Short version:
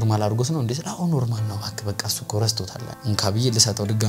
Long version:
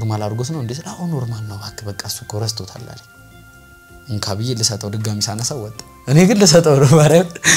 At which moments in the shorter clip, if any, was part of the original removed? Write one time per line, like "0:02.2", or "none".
0:02.9